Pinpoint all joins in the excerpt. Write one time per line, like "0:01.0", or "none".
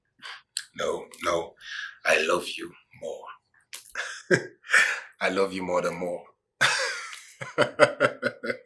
none